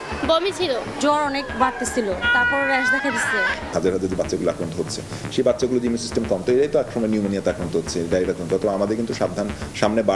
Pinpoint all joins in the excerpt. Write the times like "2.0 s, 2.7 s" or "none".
0.9 s, 2.2 s, 3.7 s